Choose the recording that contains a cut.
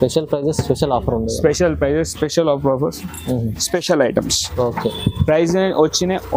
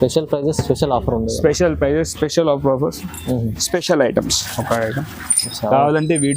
second; 1 cut; at 4.4 s

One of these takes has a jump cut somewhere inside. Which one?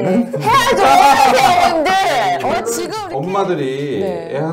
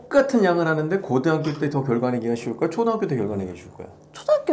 first; 1 cut; at 2.6 s

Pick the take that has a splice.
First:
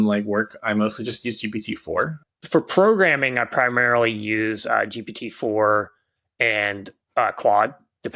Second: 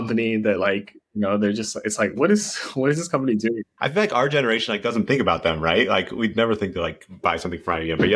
first; 1 cut; at 2.3 s

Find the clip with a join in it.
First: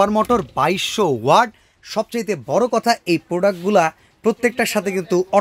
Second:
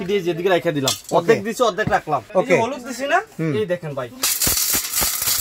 second; 1 cut; at 2.2 s

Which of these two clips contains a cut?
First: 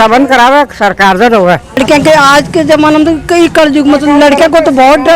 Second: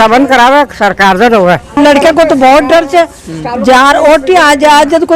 second; 1 cut; at 1.8 s

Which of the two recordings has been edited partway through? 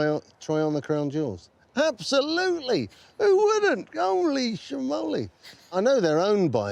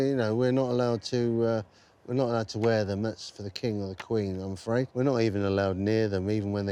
first; 1 cut; at 5.7 s

